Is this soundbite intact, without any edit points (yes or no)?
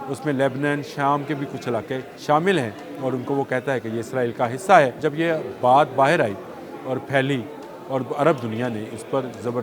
no